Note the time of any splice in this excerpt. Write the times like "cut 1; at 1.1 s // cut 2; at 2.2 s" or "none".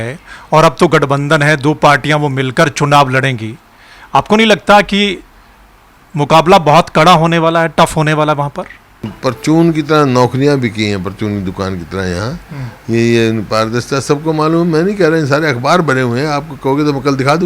cut 1; at 9.1 s